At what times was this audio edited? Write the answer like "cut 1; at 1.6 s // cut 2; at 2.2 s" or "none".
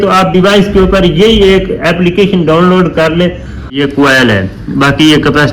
cut 1; at 3.8 s